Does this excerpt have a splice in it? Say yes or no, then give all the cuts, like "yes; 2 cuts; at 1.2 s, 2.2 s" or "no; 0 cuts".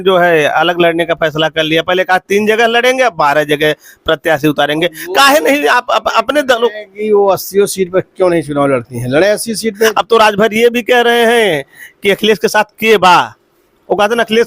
yes; 1 cut; at 9.9 s